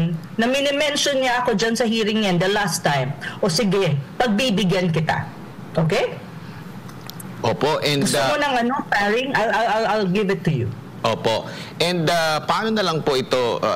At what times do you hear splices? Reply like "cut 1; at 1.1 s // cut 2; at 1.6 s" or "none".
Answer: none